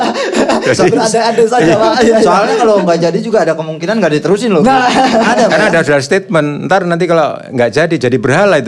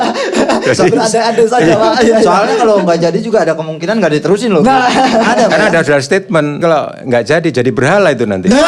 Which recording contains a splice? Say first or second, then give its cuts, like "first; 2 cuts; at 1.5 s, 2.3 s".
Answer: second; 1 cut; at 6.6 s